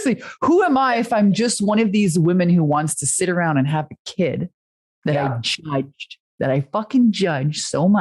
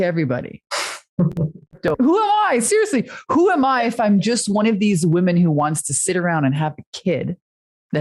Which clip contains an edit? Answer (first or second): second